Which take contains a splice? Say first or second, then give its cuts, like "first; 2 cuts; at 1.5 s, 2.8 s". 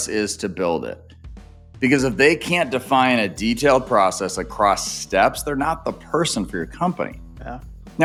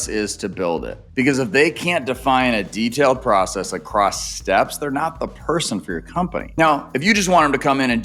second; 2 cuts; at 1.0 s, 6.5 s